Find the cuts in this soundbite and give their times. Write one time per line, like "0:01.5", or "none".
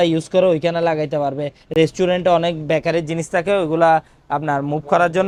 none